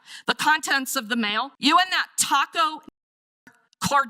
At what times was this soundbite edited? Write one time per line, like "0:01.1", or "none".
0:01.5